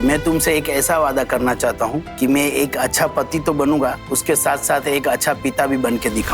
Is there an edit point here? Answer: yes; 2 cuts; at 2.0 s, 4.1 s

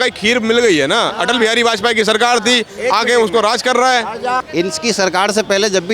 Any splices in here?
yes; 1 cut; at 4.4 s

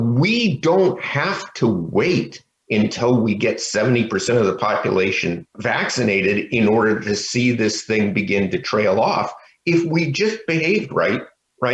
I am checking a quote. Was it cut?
no; 0 cuts

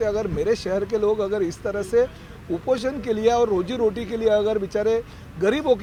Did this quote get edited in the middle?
no; 0 cuts

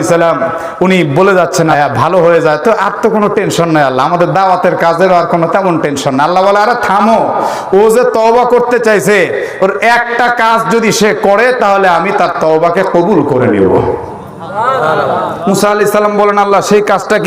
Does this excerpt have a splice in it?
yes; 1 cut; at 1.7 s

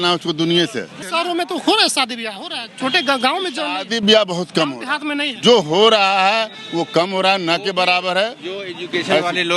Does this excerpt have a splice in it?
no; 0 cuts

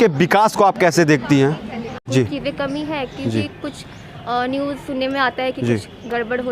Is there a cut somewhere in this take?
yes; 1 cut; at 2.1 s

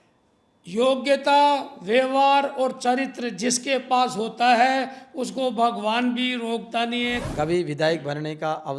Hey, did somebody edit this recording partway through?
yes; 1 cut; at 7.2 s

